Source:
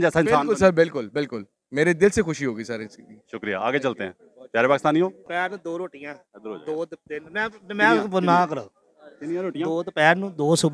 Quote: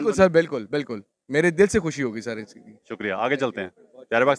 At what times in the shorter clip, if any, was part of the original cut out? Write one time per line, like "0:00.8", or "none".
none

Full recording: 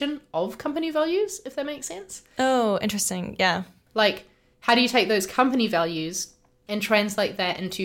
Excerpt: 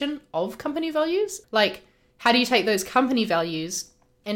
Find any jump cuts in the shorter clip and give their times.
0:01.4

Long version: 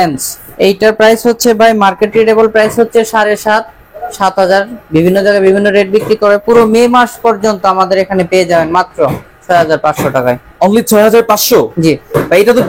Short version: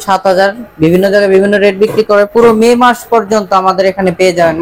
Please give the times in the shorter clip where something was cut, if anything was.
none

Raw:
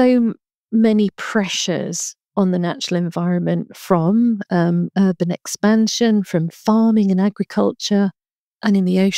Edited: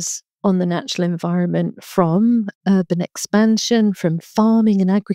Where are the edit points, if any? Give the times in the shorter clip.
0:02.5

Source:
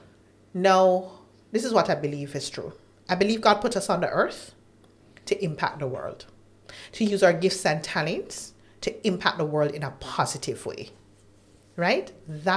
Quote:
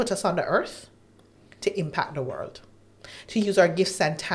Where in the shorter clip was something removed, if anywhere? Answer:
none

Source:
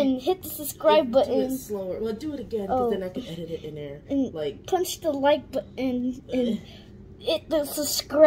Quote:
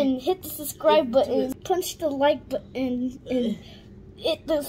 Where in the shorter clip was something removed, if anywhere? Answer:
0:01.6

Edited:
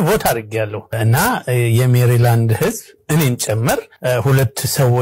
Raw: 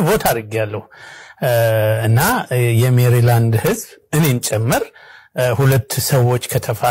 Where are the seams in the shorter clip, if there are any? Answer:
0:01.0
0:03.9

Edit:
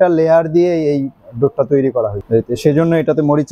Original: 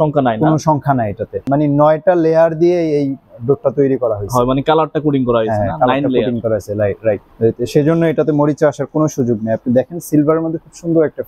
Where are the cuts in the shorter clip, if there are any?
0:02.2

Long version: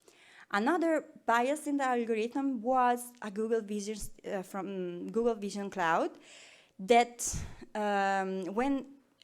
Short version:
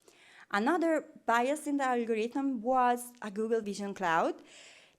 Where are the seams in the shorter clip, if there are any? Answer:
0:03.6

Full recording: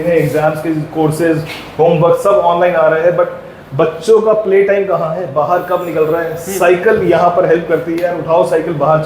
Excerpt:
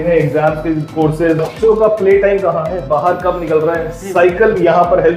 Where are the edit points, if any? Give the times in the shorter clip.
0:01.5

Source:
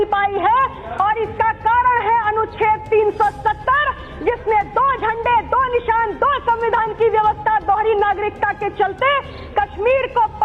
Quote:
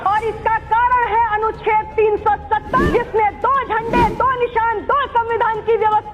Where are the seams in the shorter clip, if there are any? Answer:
0:02.9

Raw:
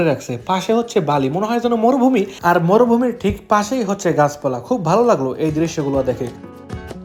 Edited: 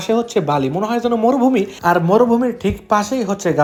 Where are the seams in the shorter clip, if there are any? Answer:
none

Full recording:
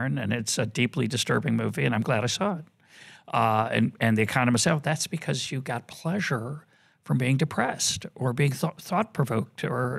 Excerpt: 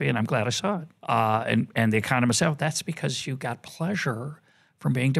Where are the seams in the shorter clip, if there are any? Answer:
0:00.9

